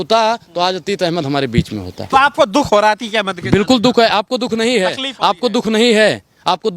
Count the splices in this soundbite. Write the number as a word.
one